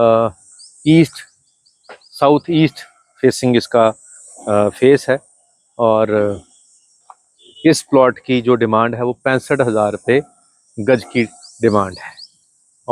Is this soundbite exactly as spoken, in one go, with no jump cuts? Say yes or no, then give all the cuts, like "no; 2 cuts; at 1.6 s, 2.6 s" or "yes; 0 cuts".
yes; 0 cuts